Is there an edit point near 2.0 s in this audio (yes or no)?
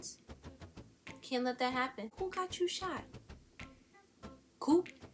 yes